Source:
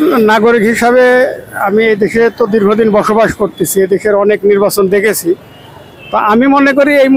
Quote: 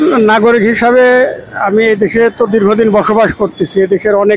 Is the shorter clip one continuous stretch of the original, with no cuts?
yes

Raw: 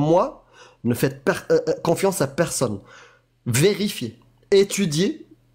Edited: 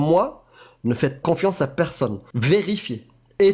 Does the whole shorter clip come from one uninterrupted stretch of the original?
no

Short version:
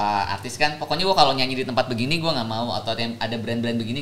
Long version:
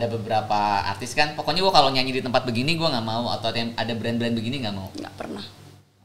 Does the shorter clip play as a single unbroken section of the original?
yes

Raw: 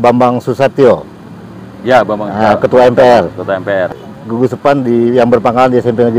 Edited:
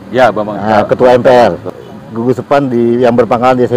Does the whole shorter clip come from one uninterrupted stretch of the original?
no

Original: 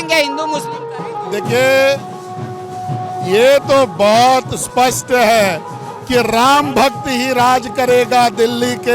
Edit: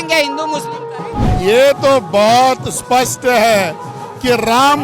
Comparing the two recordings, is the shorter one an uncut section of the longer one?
no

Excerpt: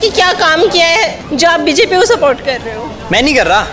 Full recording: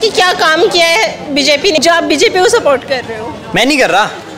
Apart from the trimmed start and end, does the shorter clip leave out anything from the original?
yes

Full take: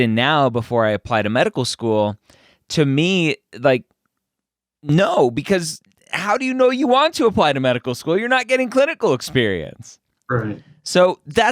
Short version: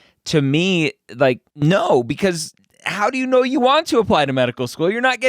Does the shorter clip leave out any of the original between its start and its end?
yes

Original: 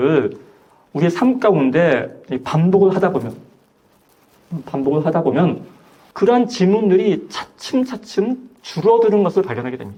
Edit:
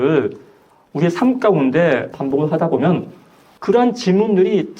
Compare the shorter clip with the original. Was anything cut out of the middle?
yes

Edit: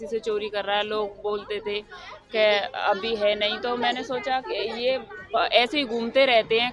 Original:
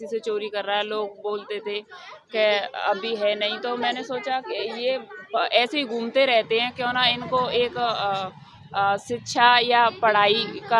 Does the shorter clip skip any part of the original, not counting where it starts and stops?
no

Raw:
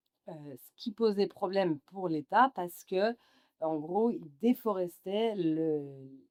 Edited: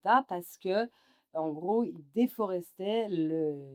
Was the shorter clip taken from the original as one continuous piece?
yes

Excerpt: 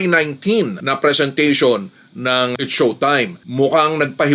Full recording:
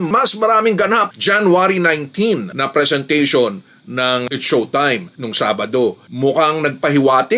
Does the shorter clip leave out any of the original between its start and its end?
yes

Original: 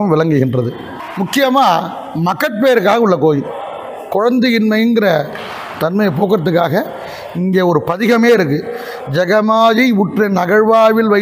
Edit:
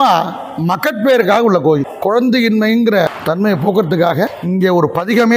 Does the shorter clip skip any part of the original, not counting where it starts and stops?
yes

